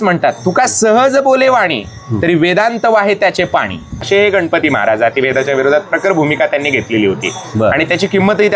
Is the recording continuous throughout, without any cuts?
no; 1 cut; at 4.1 s

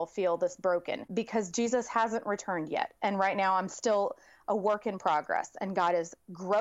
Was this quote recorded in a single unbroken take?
no; 1 cut; at 1.1 s

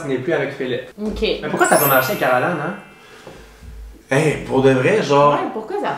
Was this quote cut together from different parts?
yes; 1 cut; at 1.4 s

